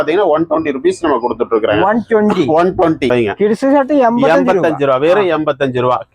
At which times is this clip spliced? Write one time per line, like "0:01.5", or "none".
0:03.1